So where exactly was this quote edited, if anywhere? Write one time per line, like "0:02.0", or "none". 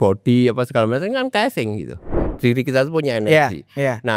0:02.2